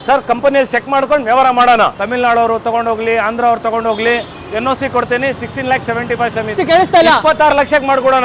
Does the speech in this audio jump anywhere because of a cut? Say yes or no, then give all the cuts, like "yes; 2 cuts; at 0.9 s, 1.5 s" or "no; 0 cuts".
yes; 2 cuts; at 1.9 s, 6.5 s